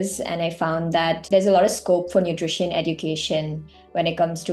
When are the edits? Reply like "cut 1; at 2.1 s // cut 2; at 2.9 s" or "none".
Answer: cut 1; at 1.2 s